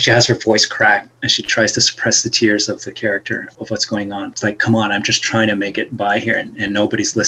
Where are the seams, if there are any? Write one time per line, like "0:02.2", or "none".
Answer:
0:03.5
0:04.3